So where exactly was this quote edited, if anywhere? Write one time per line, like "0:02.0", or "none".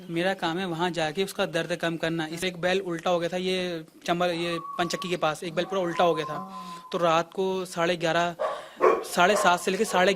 0:02.4